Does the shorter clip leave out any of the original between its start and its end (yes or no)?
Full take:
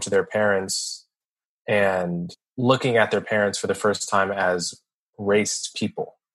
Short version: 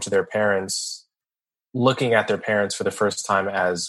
yes